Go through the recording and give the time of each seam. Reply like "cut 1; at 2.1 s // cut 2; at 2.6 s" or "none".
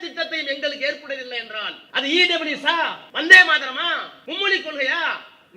cut 1; at 1.8 s // cut 2; at 3.0 s // cut 3; at 4.1 s